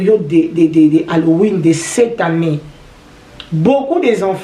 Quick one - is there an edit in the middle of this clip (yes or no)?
no